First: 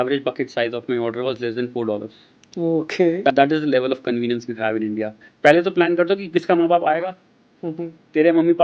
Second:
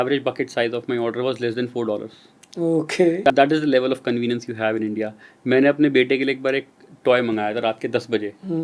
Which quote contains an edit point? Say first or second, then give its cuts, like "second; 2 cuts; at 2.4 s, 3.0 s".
first; 1 cut; at 5.3 s